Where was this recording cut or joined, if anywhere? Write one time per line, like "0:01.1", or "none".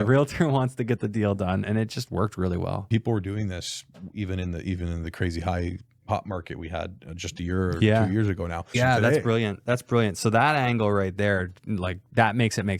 0:02.8
0:08.8